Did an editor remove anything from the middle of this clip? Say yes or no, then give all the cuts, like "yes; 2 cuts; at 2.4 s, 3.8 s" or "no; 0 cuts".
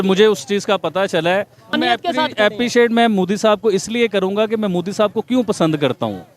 yes; 1 cut; at 1.7 s